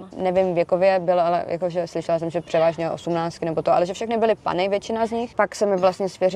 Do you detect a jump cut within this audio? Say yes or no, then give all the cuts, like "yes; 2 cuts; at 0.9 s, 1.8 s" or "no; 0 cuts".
yes; 1 cut; at 5.3 s